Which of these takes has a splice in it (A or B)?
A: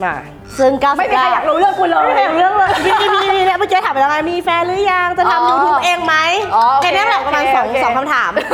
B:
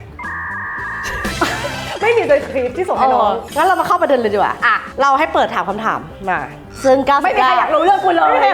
B